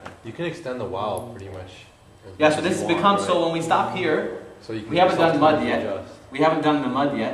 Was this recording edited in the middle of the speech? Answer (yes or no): no